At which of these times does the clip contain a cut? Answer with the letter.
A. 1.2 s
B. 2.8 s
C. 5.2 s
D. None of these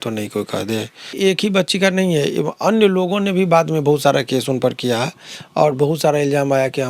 A